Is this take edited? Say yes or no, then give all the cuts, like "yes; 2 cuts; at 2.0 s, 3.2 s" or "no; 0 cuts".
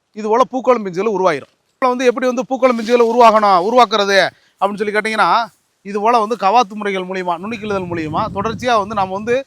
yes; 1 cut; at 1.8 s